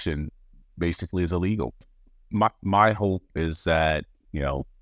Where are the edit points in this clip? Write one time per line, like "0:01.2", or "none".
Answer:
0:02.0